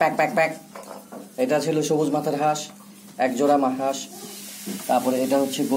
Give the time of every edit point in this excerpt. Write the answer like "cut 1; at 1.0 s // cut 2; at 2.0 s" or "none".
none